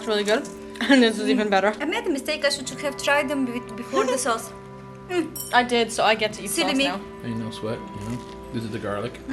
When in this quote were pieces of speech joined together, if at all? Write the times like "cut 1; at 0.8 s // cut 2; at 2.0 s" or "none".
cut 1; at 1.8 s